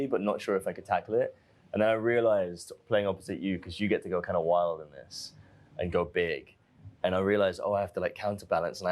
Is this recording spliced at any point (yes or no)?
no